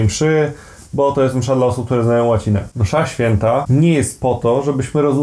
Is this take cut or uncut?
cut